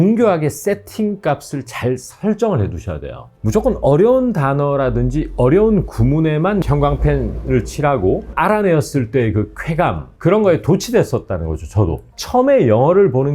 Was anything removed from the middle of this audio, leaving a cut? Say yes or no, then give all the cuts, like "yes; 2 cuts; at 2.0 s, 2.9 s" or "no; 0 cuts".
yes; 4 cuts; at 3.3 s, 6.6 s, 8.3 s, 12.1 s